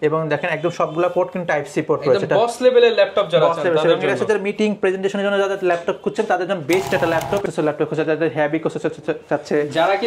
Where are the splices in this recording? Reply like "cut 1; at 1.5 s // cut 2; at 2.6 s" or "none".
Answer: cut 1; at 7.5 s